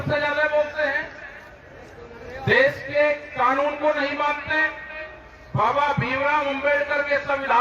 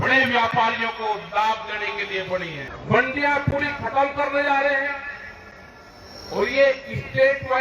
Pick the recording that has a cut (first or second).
second